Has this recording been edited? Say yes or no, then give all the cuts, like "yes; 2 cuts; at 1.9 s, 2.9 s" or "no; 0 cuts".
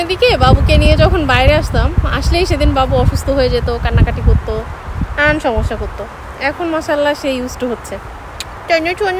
no; 0 cuts